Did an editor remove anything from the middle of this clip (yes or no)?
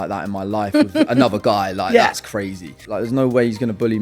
yes